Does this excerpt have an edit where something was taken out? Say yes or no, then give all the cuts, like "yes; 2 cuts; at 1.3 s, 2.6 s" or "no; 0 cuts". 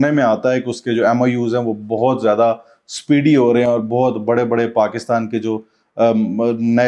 no; 0 cuts